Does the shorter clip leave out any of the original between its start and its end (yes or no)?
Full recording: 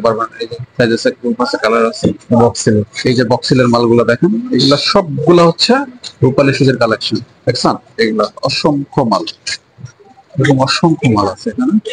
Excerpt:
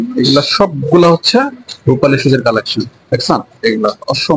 no